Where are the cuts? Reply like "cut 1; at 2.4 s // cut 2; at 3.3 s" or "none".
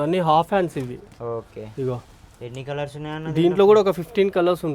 none